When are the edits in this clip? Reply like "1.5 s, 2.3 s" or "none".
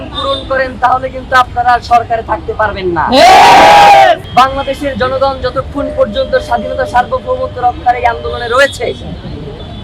4.2 s